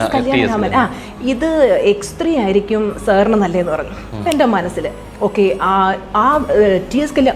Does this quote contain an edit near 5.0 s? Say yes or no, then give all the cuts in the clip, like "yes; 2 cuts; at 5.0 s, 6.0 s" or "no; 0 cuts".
yes; 1 cut; at 5.0 s